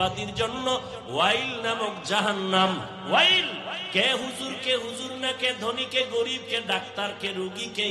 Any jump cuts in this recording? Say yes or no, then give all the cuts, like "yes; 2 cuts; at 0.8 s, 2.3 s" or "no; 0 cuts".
yes; 1 cut; at 3.8 s